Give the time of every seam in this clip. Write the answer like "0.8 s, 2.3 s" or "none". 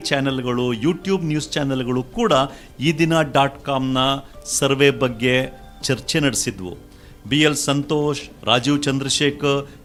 none